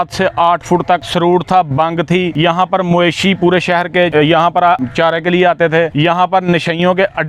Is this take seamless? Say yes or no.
no